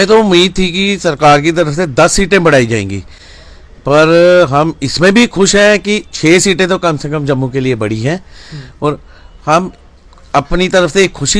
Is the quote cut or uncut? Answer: uncut